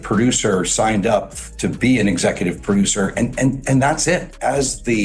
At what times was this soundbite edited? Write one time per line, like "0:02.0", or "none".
0:01.0